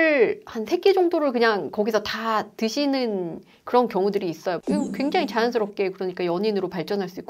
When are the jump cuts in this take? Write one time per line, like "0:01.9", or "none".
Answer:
none